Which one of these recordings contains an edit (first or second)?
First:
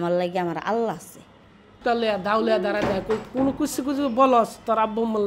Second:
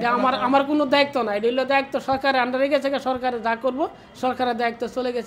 first